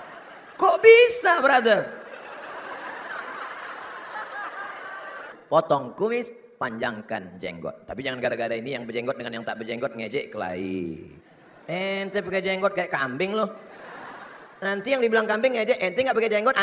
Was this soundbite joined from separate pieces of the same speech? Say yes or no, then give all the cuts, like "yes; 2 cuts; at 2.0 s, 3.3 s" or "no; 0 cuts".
yes; 1 cut; at 5.3 s